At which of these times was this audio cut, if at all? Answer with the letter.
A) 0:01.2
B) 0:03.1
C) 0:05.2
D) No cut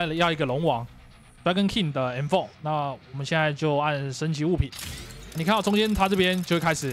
D